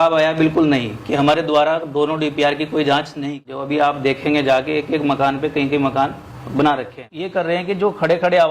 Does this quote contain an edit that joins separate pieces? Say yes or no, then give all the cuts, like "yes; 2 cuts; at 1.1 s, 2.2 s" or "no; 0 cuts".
yes; 2 cuts; at 3.1 s, 7.3 s